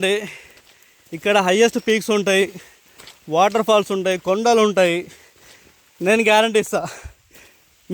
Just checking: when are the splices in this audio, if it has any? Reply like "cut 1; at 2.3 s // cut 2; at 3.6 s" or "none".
none